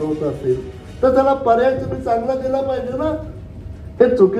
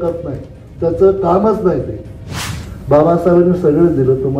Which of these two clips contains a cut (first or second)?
second